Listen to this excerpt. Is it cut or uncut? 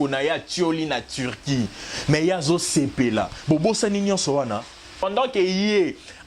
cut